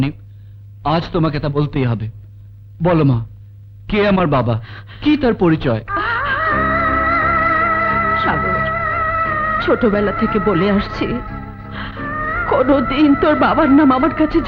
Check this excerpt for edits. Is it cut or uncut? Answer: uncut